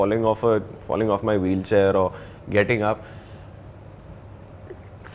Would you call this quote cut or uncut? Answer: uncut